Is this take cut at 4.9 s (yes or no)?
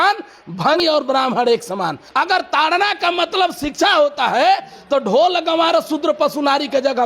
no